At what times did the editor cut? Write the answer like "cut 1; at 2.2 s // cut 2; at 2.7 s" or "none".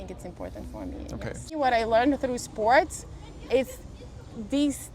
cut 1; at 1.5 s